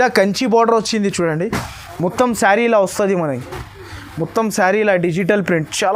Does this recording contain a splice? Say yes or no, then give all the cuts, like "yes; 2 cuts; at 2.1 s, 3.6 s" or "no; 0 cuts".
no; 0 cuts